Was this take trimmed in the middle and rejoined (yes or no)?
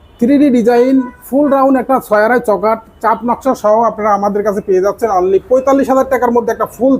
no